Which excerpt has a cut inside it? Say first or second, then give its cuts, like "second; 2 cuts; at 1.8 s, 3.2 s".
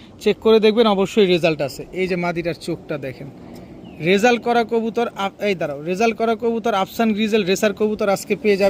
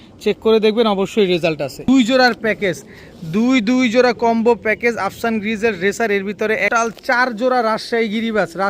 second; 2 cuts; at 1.9 s, 6.7 s